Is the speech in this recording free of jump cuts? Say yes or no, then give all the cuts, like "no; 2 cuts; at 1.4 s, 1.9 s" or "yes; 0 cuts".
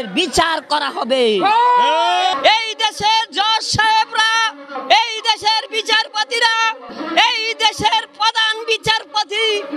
yes; 0 cuts